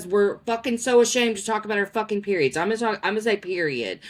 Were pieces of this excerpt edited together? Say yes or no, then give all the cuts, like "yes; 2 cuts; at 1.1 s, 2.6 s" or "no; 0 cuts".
no; 0 cuts